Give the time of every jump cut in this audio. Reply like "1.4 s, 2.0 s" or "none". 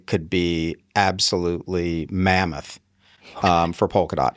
none